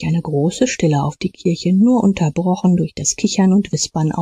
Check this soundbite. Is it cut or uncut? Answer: uncut